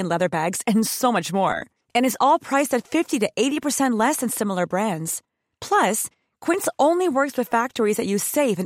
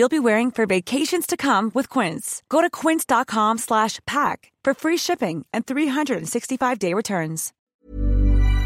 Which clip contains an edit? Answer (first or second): second